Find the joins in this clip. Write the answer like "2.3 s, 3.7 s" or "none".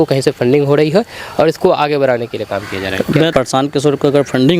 3.3 s